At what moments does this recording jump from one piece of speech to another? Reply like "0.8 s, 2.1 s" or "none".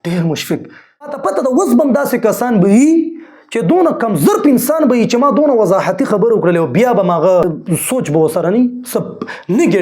1.1 s, 7.6 s